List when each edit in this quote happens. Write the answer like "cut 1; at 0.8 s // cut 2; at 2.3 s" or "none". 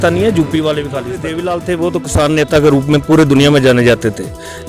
cut 1; at 1.2 s